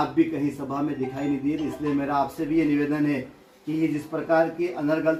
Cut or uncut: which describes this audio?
uncut